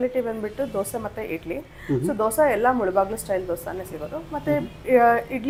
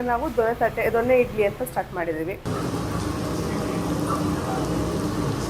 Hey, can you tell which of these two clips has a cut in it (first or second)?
second